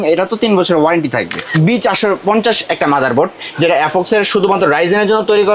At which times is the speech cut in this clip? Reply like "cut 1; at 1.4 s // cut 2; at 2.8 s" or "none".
cut 1; at 1.4 s